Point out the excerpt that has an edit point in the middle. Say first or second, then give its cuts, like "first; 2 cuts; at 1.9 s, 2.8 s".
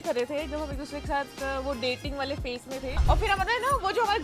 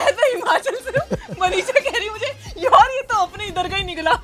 first; 1 cut; at 3.0 s